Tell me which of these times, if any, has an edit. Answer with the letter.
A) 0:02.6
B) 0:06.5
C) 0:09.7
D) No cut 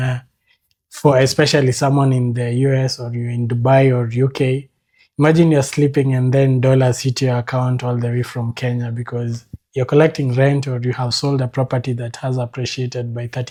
D